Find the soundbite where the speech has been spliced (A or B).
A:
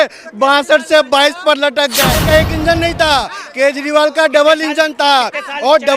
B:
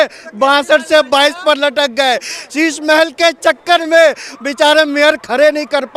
A